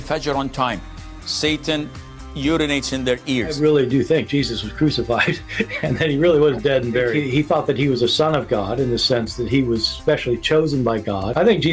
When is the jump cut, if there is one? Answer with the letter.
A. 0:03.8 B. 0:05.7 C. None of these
B